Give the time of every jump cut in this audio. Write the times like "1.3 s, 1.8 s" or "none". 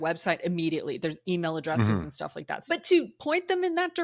2.6 s